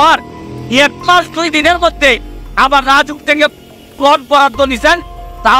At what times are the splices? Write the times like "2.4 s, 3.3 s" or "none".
none